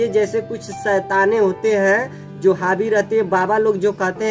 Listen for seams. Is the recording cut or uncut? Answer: uncut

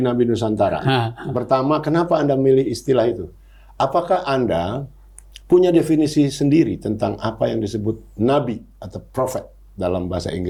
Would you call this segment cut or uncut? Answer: uncut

